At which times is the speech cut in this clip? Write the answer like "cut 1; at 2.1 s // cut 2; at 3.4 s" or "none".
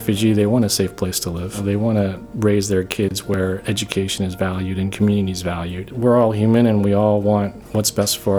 cut 1; at 1.6 s // cut 2; at 5.9 s

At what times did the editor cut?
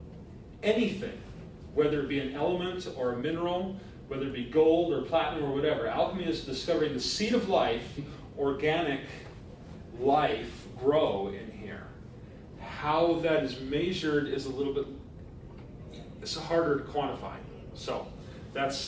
none

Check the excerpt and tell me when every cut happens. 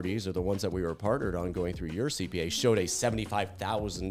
none

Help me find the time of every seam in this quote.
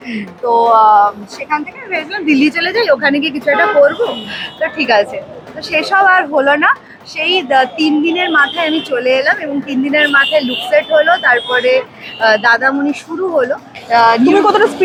none

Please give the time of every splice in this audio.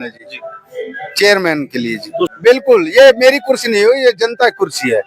cut 1; at 2.3 s

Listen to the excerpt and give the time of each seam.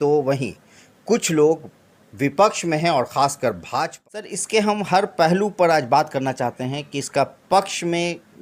cut 1; at 4.4 s

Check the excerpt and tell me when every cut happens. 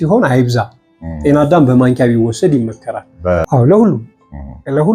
cut 1; at 3.4 s

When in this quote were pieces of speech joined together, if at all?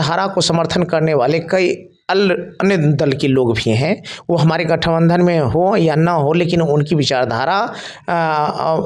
none

